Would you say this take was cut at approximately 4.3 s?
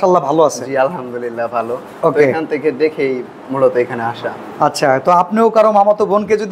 no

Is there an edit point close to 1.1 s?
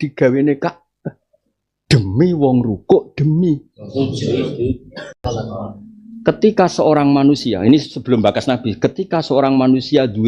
no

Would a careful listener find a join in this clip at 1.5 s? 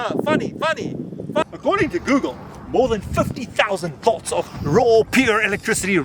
yes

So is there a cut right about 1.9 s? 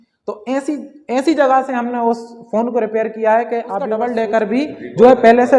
no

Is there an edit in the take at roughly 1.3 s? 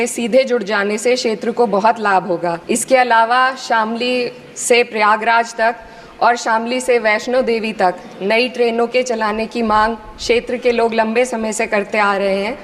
no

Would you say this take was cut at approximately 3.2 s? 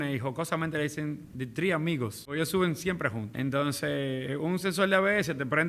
yes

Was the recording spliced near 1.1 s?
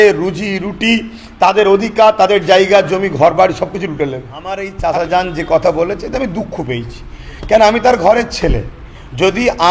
no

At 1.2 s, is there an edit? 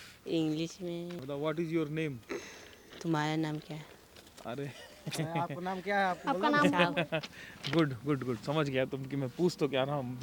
yes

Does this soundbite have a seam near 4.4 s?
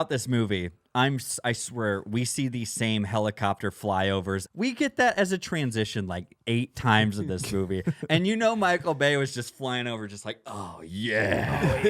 yes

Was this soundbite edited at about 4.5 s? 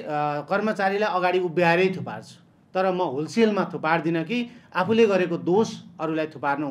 no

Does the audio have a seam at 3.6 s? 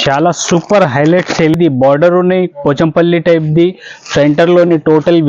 no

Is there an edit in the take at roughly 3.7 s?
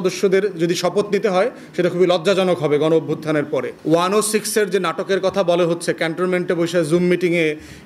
yes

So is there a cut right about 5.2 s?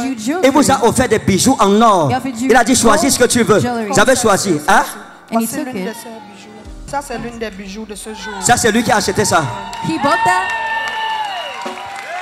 no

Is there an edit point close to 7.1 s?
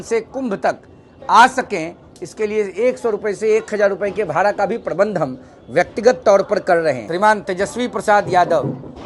yes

